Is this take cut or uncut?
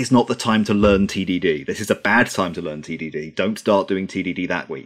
uncut